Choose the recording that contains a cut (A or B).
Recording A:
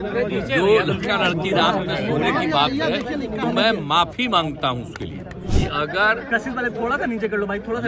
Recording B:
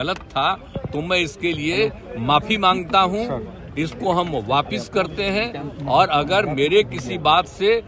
A